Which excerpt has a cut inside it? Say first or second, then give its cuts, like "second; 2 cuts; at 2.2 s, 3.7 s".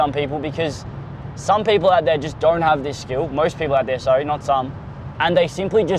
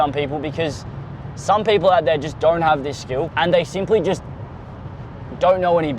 second; 1 cut; at 3.3 s